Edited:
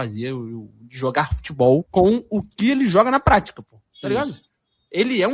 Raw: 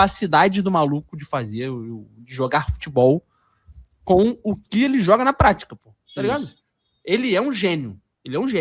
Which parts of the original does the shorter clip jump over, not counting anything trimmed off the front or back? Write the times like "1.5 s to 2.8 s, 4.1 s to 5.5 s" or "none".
3.2 s to 4.0 s